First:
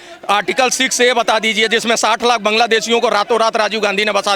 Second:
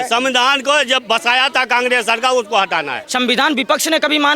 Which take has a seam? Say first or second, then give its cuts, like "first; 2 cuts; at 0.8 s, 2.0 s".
second; 1 cut; at 3.0 s